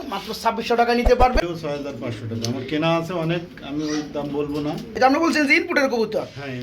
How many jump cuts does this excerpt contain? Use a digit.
2